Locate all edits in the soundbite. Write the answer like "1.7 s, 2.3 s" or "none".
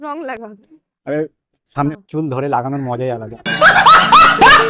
1.9 s